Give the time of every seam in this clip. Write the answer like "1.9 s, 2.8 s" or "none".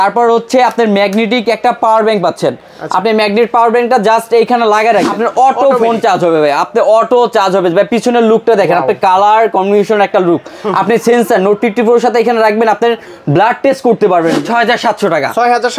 14.4 s